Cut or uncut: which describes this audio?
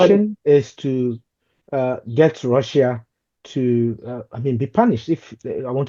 uncut